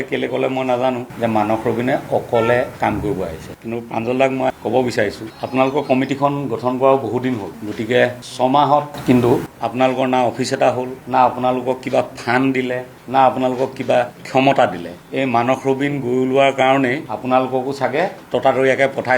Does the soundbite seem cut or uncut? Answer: cut